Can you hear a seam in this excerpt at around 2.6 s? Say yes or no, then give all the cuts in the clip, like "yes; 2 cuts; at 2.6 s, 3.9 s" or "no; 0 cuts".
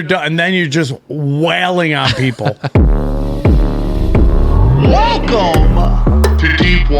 yes; 1 cut; at 2.6 s